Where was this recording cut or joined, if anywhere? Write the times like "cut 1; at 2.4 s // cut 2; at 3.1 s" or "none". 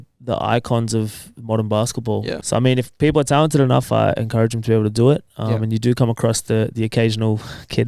cut 1; at 2.4 s